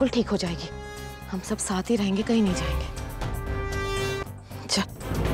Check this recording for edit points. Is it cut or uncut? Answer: cut